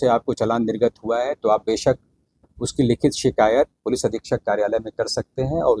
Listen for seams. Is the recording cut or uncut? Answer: uncut